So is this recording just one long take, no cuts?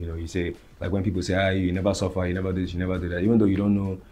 yes; 0 cuts

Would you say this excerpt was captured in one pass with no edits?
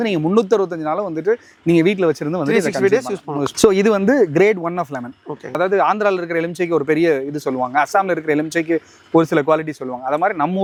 yes; 0 cuts

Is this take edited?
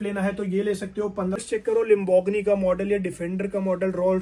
yes; 1 cut; at 1.4 s

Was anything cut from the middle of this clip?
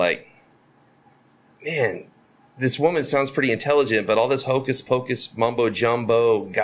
no; 0 cuts

